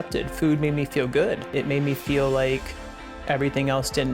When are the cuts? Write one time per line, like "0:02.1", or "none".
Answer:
0:01.5